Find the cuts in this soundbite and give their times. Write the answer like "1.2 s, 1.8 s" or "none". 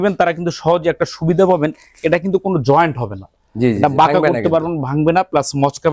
none